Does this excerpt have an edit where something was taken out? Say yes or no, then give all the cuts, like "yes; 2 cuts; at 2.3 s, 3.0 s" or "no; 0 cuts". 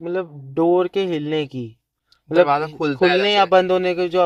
no; 0 cuts